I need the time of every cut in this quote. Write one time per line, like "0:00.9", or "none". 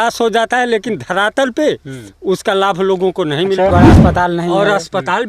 0:03.7

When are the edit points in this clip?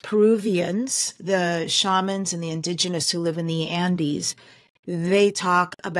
none

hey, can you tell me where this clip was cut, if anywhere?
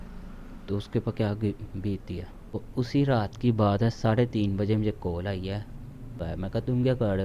0:02.6
0:06.2

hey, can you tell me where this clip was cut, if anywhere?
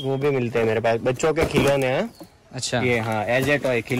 none

